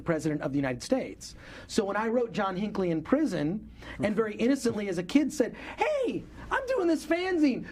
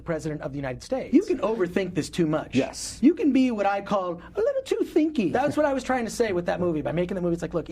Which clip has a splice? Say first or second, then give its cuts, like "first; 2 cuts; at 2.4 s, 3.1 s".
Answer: second; 2 cuts; at 1.0 s, 5.3 s